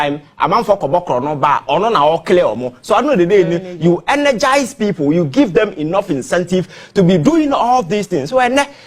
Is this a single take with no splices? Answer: yes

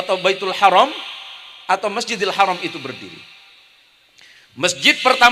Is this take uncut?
yes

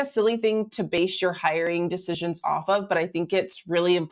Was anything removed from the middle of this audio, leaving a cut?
no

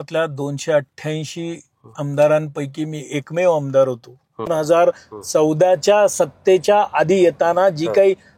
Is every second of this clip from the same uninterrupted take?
no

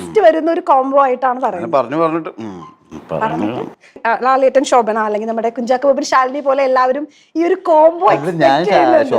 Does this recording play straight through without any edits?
no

